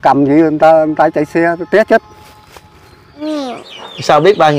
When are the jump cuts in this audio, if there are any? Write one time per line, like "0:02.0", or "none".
0:03.1